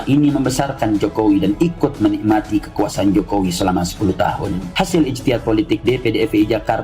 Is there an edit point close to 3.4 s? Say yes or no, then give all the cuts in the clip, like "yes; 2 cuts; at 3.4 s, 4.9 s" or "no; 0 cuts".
no; 1 cut; at 4.6 s